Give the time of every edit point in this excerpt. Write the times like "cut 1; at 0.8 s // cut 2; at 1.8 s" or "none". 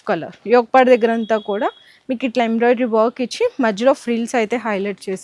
none